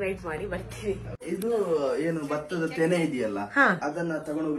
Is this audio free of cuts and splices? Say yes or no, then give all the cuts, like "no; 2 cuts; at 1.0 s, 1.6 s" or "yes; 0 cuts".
no; 1 cut; at 1.2 s